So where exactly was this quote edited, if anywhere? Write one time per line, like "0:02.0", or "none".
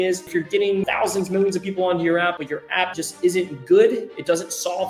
0:00.8
0:02.7

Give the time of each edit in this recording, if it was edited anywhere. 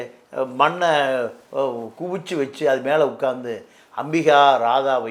none

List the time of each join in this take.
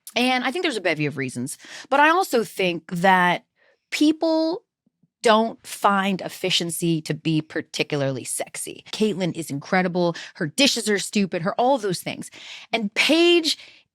0:08.9

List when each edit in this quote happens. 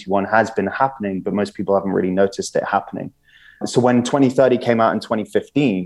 0:03.6

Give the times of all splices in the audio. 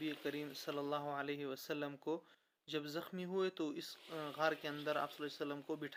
none

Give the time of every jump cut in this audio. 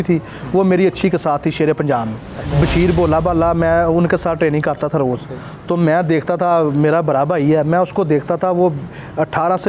0:02.5

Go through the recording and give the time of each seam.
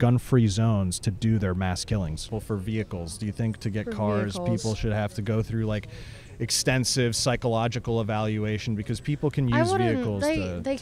0:02.3

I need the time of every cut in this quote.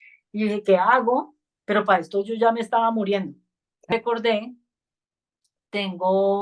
0:03.9

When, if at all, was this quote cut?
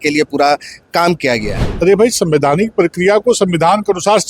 0:01.5

